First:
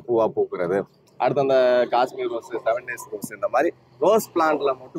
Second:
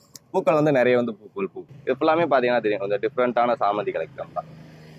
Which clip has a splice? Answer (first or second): second